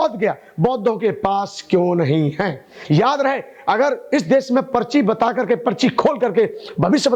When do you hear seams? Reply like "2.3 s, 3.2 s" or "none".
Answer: 2.7 s